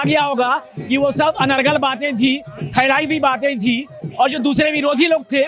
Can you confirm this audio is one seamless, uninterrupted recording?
yes; 0 cuts

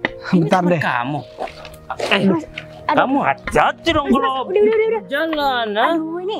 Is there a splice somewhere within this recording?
no; 0 cuts

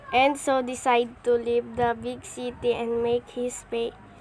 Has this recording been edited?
yes; 1 cut; at 1.1 s

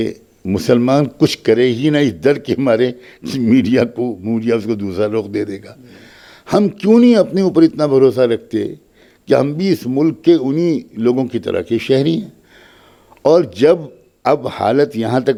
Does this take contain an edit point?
no; 0 cuts

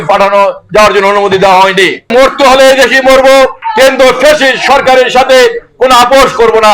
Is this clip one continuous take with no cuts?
no; 2 cuts; at 2.1 s, 3.6 s

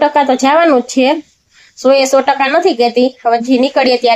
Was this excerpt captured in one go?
yes; 0 cuts

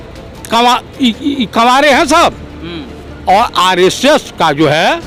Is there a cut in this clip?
no; 0 cuts

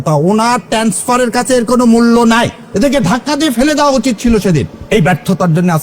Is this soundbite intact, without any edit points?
no; 2 cuts; at 2.6 s, 4.8 s

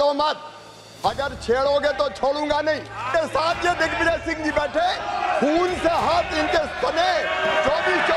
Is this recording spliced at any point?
yes; 1 cut; at 3.1 s

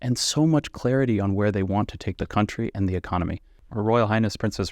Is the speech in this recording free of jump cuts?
no; 1 cut; at 3.6 s

